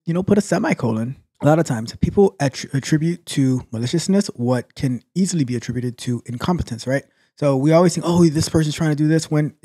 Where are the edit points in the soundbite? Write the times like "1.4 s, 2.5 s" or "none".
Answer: 1.2 s